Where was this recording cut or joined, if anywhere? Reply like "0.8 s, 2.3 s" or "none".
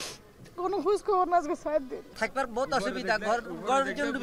2.0 s